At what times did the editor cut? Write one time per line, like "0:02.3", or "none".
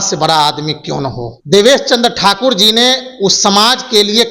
0:01.3